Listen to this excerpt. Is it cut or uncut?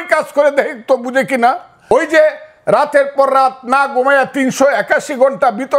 cut